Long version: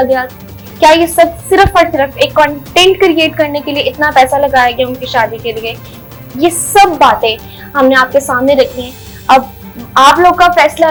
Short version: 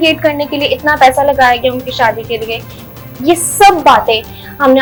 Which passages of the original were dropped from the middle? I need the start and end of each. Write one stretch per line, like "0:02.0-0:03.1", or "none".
none